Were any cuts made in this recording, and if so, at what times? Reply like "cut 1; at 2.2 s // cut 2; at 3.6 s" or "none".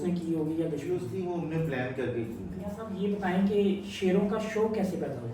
cut 1; at 1.1 s // cut 2; at 2.8 s